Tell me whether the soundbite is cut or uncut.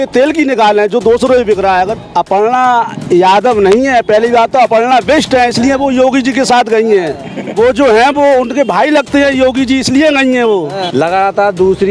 cut